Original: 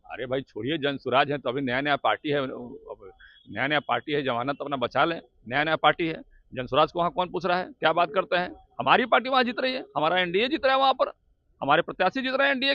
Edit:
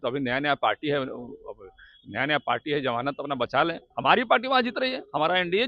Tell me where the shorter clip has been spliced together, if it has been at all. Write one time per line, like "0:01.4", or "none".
0:03.8